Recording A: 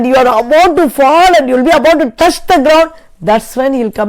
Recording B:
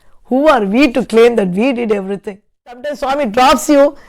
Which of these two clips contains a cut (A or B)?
B